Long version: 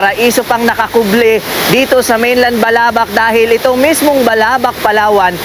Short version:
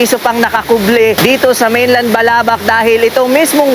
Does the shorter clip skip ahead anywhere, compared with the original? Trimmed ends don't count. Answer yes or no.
yes